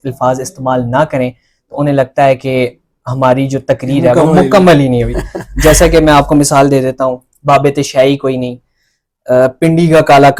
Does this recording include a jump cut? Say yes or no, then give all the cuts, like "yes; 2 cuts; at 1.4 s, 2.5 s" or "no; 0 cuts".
no; 0 cuts